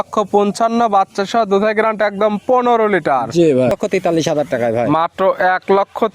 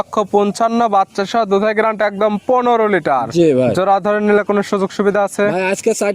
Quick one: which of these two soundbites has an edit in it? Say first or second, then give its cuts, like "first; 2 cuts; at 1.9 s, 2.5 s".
first; 1 cut; at 3.7 s